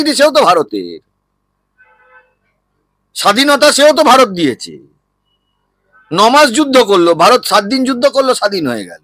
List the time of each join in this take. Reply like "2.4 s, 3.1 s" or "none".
none